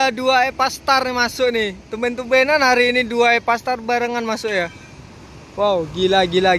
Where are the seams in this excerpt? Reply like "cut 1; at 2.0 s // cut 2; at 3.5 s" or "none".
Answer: none